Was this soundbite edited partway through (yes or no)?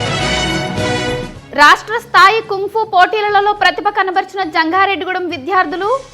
yes